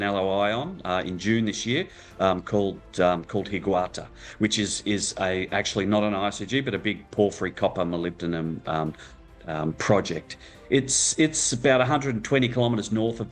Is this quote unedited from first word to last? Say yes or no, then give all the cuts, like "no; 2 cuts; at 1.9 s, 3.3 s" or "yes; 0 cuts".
yes; 0 cuts